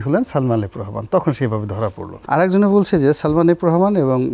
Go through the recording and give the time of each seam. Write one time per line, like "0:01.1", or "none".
0:02.1